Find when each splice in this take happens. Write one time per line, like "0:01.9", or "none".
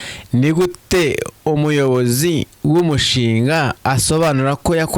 0:01.3
0:02.5